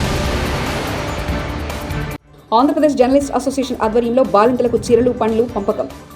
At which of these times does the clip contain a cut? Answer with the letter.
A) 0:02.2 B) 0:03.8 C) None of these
A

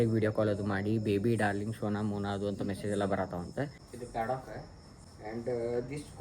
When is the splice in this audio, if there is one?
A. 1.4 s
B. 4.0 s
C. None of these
B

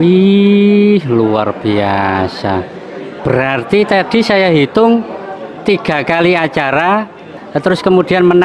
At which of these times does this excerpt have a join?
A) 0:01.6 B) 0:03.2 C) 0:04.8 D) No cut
D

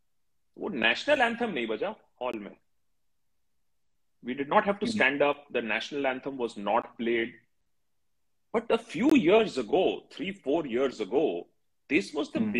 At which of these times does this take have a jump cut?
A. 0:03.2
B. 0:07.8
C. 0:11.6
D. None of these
D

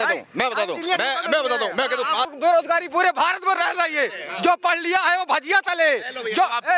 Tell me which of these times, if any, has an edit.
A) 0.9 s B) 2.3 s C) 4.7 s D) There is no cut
B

